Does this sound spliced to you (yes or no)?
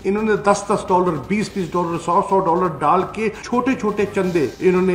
yes